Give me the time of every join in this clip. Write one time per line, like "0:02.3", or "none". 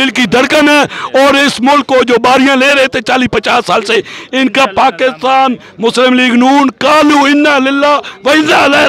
none